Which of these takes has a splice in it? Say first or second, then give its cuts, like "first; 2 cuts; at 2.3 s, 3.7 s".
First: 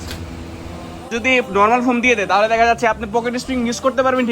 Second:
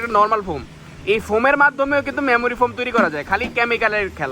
first; 1 cut; at 1.1 s